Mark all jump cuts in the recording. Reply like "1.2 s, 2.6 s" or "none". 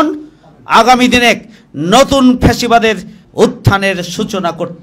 3.2 s